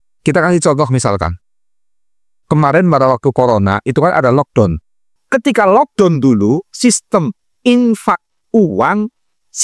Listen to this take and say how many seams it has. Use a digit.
1